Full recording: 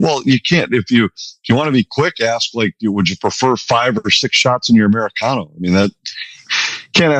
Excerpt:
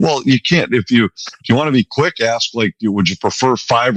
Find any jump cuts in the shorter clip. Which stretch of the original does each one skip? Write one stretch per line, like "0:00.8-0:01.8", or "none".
none